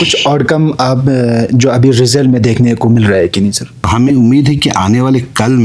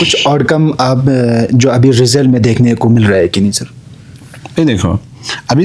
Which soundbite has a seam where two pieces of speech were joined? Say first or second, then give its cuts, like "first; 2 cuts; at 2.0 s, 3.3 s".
first; 1 cut; at 3.7 s